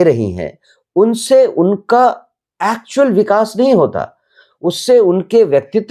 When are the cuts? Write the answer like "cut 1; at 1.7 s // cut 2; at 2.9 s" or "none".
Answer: none